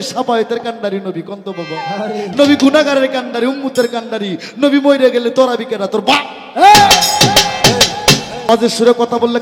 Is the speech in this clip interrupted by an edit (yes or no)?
yes